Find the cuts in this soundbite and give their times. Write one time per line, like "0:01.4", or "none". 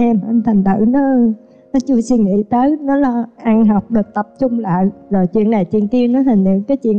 none